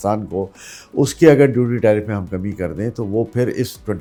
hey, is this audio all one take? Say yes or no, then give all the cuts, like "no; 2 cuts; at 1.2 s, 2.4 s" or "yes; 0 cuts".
yes; 0 cuts